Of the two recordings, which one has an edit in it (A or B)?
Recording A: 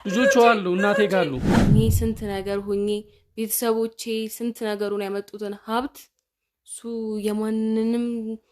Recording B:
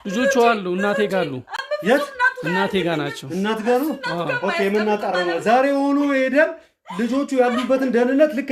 A